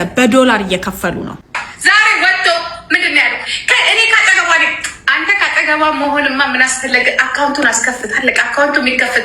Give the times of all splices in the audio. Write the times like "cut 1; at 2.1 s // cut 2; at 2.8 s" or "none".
cut 1; at 1.6 s